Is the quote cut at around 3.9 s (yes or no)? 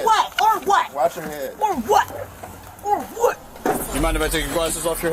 yes